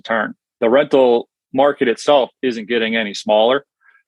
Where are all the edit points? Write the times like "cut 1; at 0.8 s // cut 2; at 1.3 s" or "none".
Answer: cut 1; at 1.4 s